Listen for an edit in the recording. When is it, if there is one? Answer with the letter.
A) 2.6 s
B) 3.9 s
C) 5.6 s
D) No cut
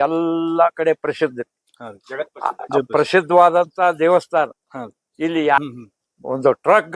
C